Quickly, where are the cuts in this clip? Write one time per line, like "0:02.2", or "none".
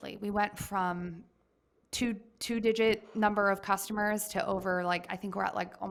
none